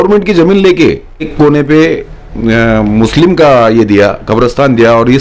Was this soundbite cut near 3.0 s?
no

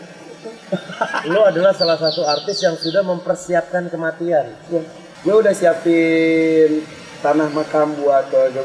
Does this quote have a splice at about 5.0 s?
yes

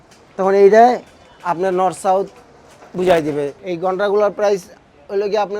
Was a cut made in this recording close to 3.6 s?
yes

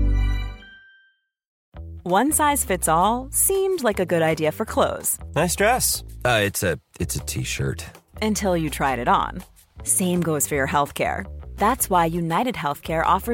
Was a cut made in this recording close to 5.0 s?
no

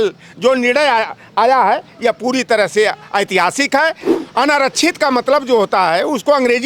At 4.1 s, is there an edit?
yes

